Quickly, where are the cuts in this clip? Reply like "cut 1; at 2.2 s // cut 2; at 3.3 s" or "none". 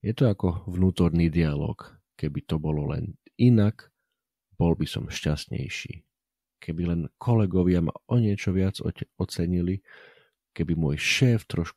none